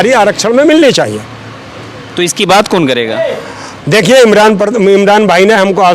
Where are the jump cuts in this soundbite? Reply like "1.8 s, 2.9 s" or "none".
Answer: none